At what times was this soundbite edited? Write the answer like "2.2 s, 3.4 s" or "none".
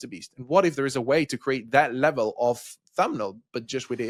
none